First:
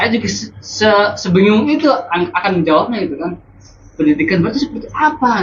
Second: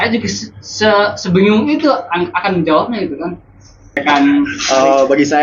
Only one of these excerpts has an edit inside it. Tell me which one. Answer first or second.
second